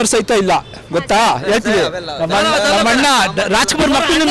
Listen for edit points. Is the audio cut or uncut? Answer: uncut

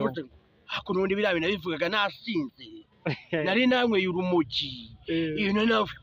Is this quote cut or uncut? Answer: uncut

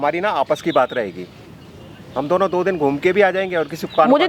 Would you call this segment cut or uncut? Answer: uncut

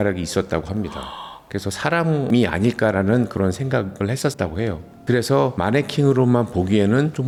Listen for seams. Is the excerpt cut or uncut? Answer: uncut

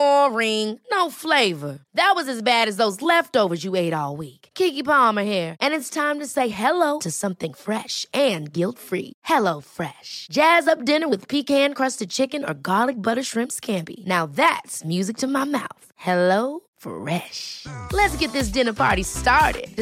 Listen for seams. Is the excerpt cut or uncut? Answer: uncut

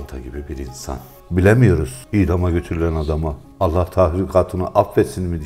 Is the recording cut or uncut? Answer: cut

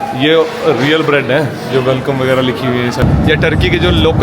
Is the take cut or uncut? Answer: cut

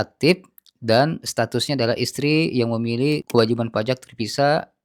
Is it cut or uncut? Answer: uncut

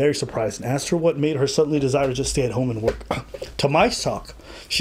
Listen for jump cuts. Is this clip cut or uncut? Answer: uncut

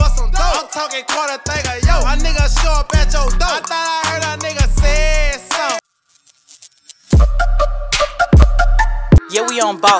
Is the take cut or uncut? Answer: cut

